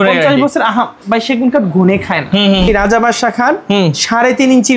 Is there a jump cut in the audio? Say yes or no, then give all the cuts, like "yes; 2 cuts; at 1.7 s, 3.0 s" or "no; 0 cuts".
yes; 1 cut; at 2.7 s